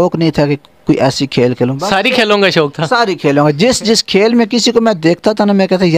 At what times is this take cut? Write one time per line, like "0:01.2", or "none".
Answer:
none

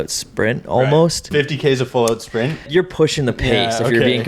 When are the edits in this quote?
0:01.3
0:02.7

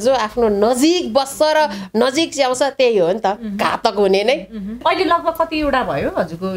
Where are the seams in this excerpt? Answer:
0:04.8

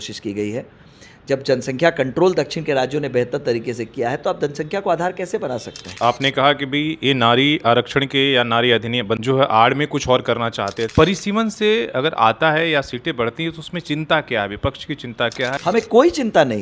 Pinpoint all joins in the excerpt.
0:06.0
0:10.8

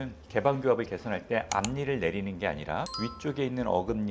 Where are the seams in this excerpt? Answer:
none

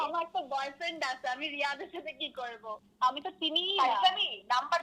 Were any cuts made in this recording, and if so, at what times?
0:02.7

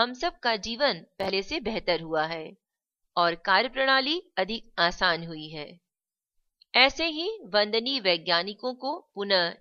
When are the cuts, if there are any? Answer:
0:01.1

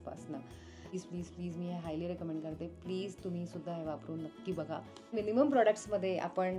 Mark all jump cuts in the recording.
0:00.9
0:05.1

